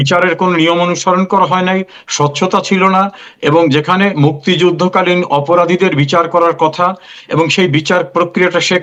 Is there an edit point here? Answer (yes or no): no